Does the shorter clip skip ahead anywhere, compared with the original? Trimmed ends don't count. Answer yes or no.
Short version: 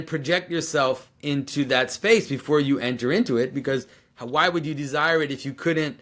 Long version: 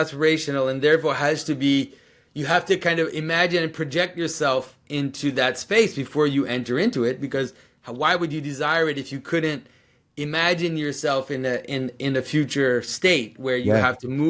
no